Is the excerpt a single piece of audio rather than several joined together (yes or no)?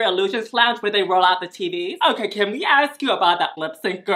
no